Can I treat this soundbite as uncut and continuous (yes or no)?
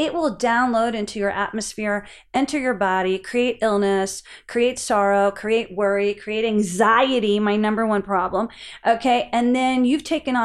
yes